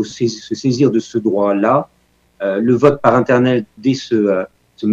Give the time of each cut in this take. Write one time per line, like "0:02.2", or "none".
0:03.7